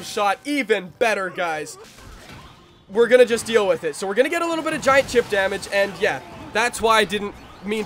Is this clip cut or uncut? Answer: cut